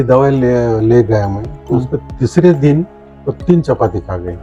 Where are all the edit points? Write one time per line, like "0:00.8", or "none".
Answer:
none